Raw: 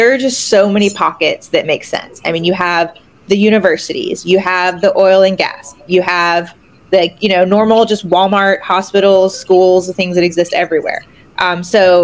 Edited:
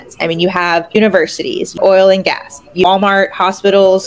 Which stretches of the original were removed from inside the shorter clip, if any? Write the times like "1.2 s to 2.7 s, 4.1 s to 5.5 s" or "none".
3.3 s to 4.4 s, 6.0 s to 8.1 s